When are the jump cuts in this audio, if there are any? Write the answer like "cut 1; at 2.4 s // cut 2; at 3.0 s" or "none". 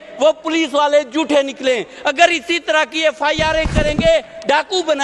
none